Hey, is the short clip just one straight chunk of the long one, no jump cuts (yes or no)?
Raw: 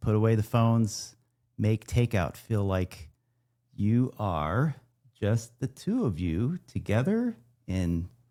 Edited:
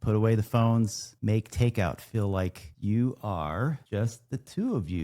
no